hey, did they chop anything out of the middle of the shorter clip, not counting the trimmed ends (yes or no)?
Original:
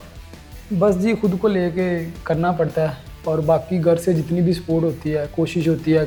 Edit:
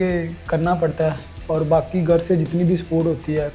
no